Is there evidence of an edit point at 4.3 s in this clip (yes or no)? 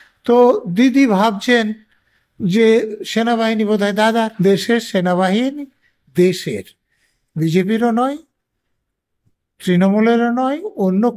yes